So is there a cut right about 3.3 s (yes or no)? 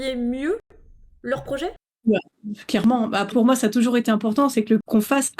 yes